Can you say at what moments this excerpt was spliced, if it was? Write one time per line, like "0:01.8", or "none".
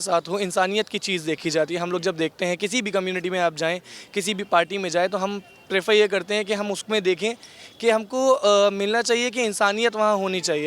none